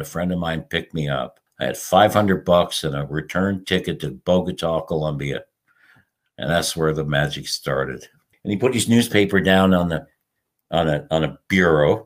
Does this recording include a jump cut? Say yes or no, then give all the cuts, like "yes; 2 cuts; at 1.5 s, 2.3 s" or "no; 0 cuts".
yes; 2 cuts; at 1.4 s, 8.3 s